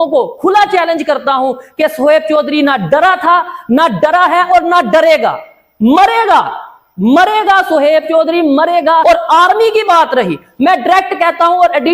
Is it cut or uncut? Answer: cut